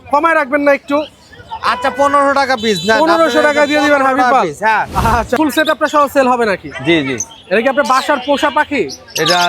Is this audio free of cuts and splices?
no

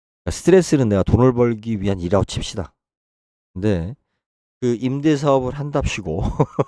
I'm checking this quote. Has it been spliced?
no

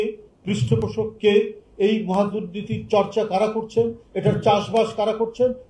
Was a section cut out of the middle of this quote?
no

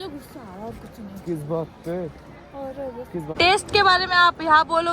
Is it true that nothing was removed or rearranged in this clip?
no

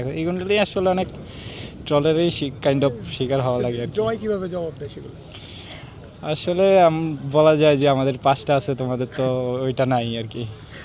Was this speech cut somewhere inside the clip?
no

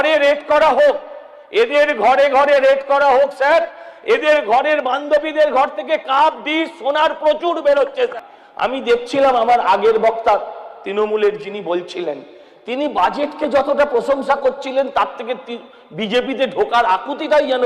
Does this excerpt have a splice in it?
yes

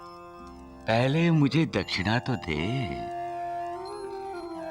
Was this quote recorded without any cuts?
yes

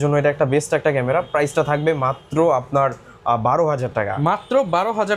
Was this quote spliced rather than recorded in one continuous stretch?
no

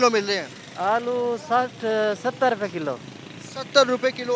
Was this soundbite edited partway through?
no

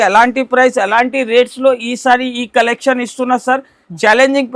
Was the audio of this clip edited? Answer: no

